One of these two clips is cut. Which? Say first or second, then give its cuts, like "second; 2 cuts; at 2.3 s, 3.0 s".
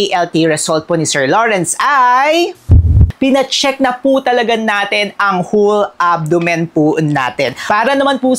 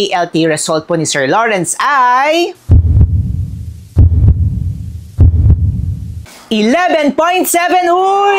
first; 2 cuts; at 3.1 s, 7.6 s